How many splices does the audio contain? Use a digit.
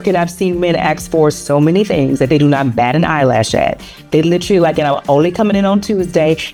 0